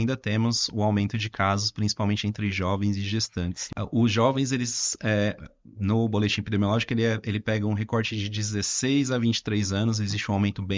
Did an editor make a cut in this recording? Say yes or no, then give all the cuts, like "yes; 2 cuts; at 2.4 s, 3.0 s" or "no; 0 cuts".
yes; 1 cut; at 3.6 s